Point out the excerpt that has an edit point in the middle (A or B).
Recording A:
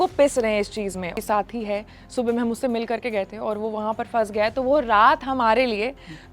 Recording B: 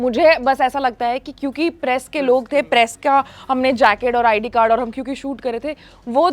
A